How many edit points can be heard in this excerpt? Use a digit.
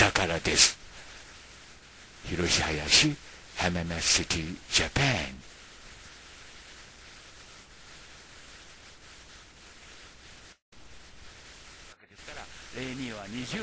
1